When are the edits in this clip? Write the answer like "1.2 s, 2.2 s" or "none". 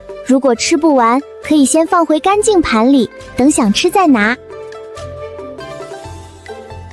5.6 s